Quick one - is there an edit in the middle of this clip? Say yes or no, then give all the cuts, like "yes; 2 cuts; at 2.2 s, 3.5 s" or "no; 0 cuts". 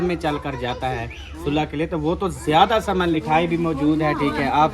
yes; 1 cut; at 3.1 s